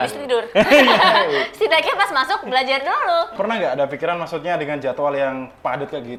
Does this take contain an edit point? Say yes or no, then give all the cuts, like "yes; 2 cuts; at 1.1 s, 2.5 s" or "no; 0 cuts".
no; 0 cuts